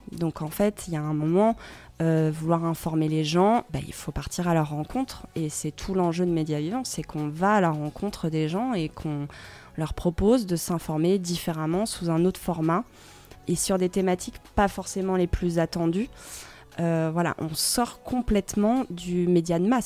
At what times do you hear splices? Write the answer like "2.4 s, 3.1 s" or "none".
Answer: 3.7 s, 13.4 s